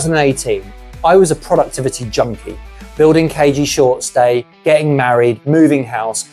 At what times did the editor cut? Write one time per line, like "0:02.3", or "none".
none